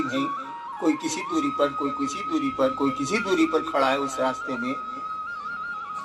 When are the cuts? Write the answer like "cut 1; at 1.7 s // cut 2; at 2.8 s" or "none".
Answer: cut 1; at 5.0 s